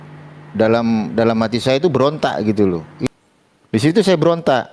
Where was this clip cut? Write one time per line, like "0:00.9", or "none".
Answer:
0:03.0